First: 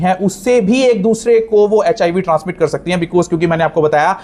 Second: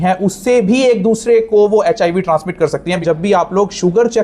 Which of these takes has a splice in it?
second; 1 cut; at 3.0 s

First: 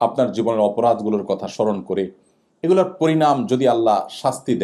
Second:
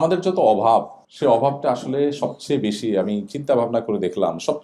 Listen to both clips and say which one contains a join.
second; 1 cut; at 1.0 s

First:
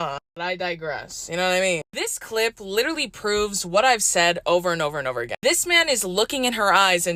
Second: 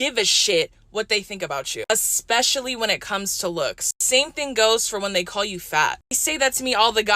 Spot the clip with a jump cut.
second; 1 cut; at 1.8 s

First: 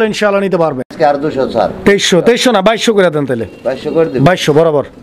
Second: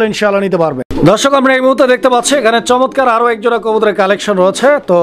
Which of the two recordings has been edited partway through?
first; 1 cut; at 0.9 s

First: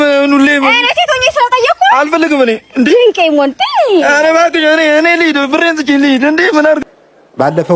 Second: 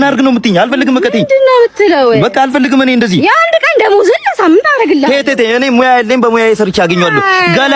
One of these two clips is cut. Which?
first; 1 cut; at 6.8 s

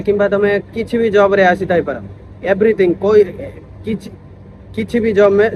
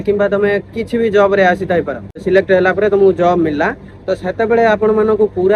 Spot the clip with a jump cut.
second; 1 cut; at 2.2 s

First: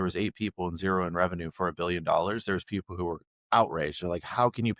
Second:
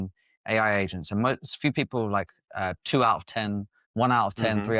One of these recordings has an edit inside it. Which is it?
second; 1 cut; at 3.8 s

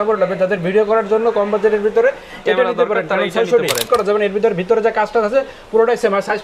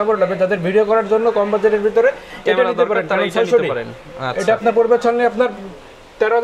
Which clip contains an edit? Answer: first; 1 cut; at 3.8 s

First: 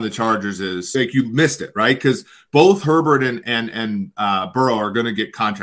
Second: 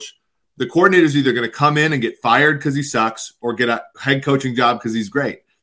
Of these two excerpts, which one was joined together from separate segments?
first; 1 cut; at 0.9 s

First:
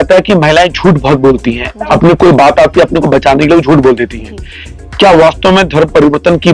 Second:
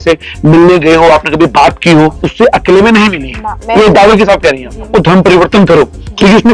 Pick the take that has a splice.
second; 2 cuts; at 2.2 s, 4.9 s

